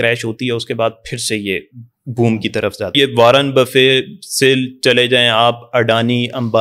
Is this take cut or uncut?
cut